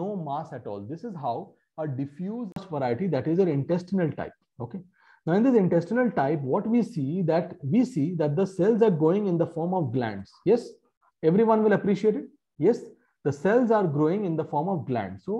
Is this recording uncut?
no; 1 cut; at 2.7 s

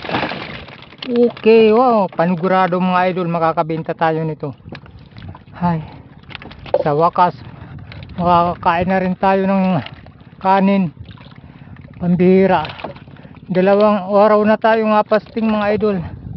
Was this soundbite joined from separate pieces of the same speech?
no; 0 cuts

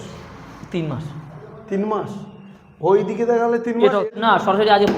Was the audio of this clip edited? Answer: yes; 1 cut; at 4.0 s

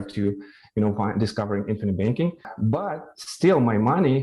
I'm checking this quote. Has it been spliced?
yes; 1 cut; at 2.5 s

